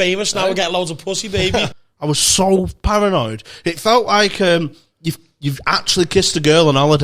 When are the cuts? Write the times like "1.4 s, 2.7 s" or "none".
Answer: 1.7 s